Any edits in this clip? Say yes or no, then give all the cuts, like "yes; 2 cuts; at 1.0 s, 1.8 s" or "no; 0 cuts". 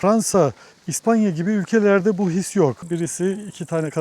yes; 1 cut; at 2.9 s